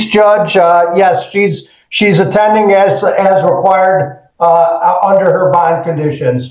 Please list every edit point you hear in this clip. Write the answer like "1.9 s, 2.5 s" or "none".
none